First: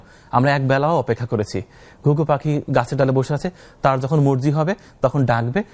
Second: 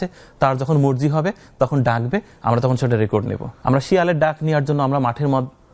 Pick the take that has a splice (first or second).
second